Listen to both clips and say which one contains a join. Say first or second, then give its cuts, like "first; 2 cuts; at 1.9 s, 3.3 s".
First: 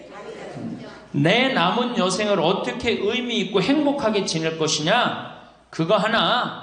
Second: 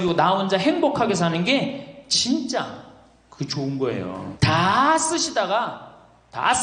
second; 1 cut; at 4.3 s